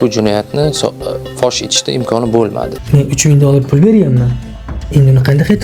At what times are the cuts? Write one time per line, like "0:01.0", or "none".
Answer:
0:02.8